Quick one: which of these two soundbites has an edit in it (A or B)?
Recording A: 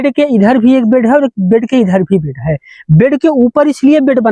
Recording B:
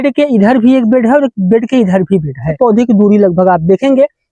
B